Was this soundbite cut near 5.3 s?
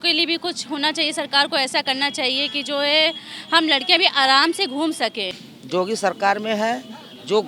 yes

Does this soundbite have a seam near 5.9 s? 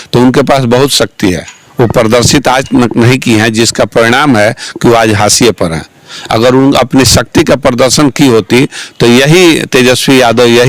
no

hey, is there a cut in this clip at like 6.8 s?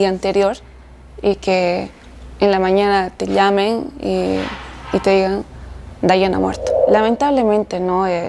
yes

